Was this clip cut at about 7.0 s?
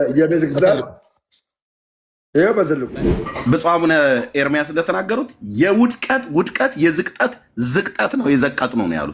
no; 1 cut; at 2.9 s

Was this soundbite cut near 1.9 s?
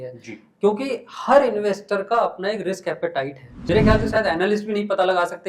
no; 1 cut; at 3.5 s

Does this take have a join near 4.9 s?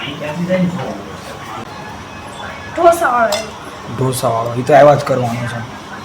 no; 1 cut; at 1.6 s

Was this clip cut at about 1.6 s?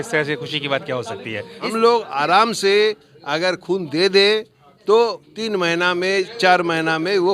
yes; 1 cut; at 1.6 s

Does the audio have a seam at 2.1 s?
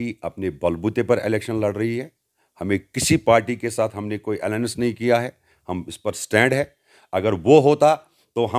no; 0 cuts

